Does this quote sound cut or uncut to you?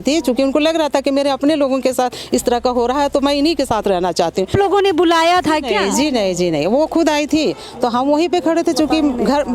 cut